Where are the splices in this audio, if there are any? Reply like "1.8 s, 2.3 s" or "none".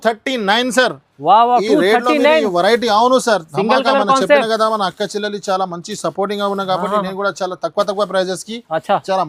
none